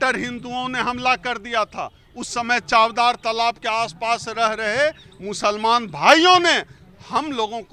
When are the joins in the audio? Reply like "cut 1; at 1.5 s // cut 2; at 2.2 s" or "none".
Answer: none

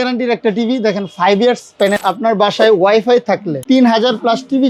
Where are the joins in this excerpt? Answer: cut 1; at 2.0 s // cut 2; at 3.5 s

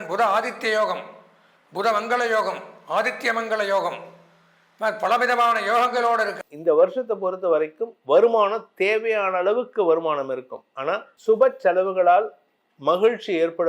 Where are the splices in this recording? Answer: cut 1; at 6.4 s // cut 2; at 11.1 s

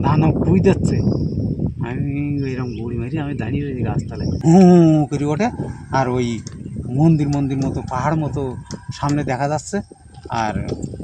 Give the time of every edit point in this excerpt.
cut 1; at 4.4 s

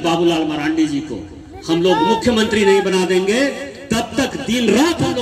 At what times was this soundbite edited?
none

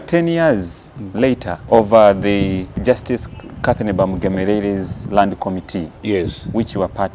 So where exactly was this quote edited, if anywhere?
cut 1; at 1.5 s // cut 2; at 2.7 s

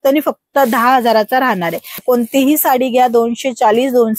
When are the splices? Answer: cut 1; at 2.0 s

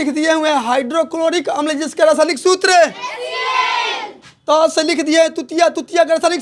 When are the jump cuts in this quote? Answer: none

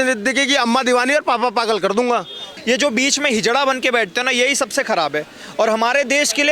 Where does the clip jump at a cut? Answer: cut 1; at 2.5 s

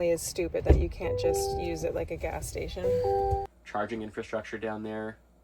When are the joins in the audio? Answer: cut 1; at 3.6 s

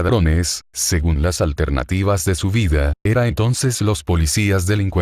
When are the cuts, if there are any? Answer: cut 1; at 3.6 s

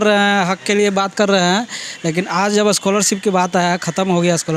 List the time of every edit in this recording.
none

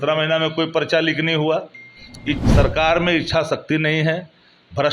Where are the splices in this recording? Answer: cut 1; at 2.4 s

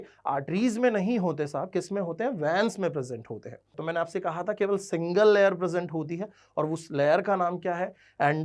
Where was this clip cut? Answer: cut 1; at 3.8 s

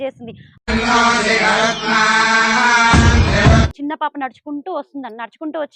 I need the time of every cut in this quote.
cut 1; at 3.7 s

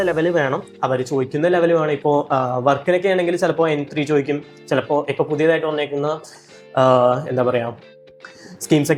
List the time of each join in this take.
none

